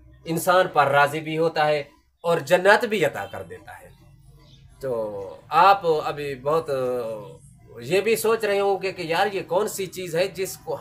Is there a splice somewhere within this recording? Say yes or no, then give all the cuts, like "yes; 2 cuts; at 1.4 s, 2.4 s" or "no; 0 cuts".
no; 0 cuts